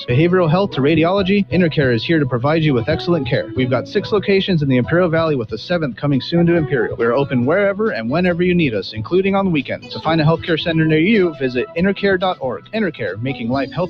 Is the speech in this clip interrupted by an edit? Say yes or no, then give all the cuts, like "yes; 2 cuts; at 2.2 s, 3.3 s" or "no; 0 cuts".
no; 0 cuts